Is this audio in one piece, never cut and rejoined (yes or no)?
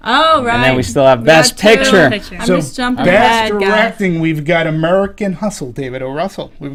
yes